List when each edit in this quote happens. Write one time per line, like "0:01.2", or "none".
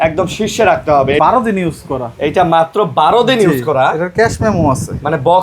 0:01.2